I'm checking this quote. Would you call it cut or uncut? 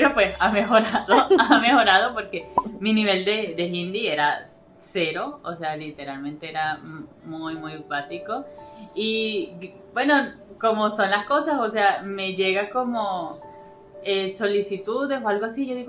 uncut